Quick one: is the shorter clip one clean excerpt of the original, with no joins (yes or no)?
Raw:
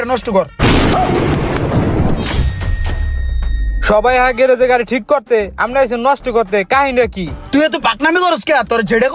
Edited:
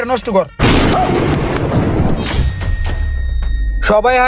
yes